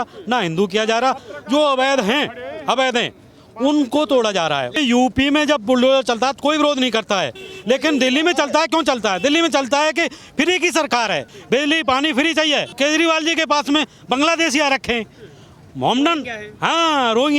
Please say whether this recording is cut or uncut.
cut